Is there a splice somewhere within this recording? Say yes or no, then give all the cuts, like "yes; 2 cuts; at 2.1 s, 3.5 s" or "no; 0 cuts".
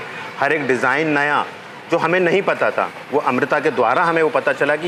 no; 0 cuts